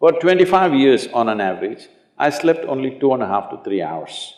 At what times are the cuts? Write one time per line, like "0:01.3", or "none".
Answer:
none